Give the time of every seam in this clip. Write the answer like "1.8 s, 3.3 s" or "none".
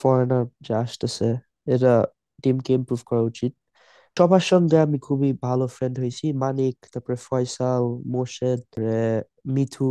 4.0 s, 8.7 s